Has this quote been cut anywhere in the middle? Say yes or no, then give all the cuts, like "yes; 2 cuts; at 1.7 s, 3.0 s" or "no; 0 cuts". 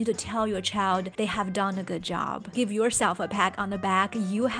yes; 2 cuts; at 1.1 s, 2.5 s